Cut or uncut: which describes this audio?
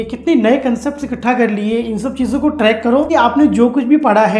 cut